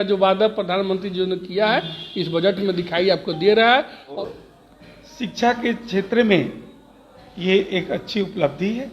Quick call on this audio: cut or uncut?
cut